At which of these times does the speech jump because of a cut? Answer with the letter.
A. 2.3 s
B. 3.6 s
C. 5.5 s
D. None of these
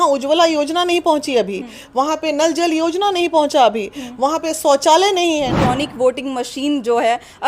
C